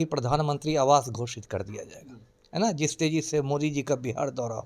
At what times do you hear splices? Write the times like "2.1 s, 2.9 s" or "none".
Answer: none